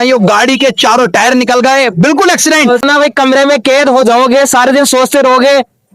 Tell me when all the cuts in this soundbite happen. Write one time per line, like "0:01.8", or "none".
0:02.8